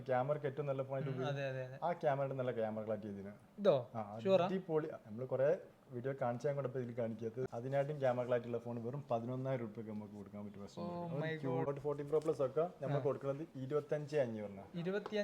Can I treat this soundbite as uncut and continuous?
no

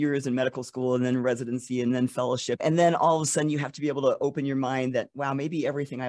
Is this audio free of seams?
no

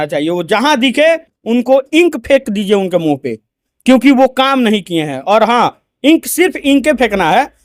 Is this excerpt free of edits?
yes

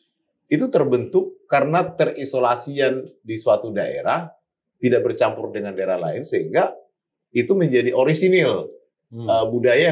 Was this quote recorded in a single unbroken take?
yes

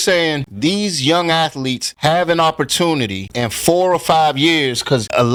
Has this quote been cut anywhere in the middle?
no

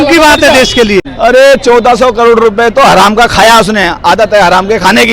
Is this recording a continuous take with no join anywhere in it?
no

